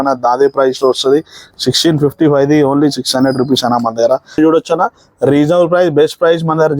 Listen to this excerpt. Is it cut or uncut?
cut